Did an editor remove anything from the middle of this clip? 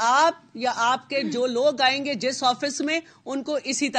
no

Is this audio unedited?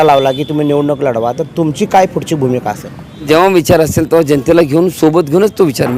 no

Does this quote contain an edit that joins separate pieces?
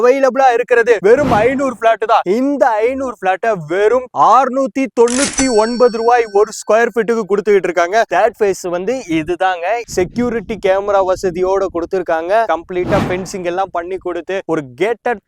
yes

